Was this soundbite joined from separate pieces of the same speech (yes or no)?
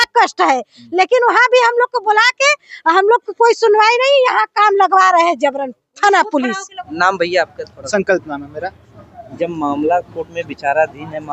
yes